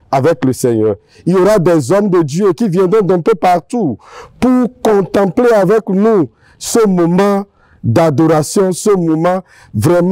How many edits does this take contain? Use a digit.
0